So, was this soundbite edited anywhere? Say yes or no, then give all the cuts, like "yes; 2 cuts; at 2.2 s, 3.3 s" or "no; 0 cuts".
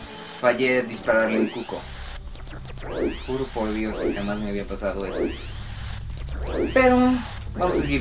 yes; 1 cut; at 5.4 s